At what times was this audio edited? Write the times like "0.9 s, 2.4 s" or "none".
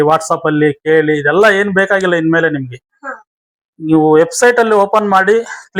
none